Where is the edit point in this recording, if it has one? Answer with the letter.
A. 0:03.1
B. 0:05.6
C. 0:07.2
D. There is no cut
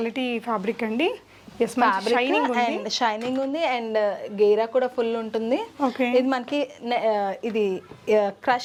D